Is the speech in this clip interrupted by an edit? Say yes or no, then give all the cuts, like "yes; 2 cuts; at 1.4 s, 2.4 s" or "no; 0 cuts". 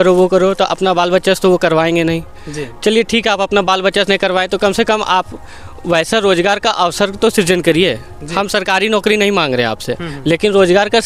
no; 0 cuts